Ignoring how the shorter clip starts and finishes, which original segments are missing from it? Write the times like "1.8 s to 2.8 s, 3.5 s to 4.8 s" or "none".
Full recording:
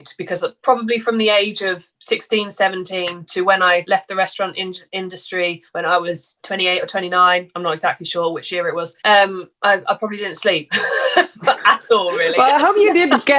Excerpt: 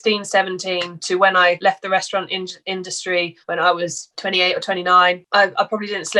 7.5 s to 9.5 s